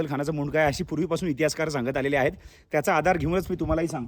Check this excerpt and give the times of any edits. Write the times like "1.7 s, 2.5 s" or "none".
none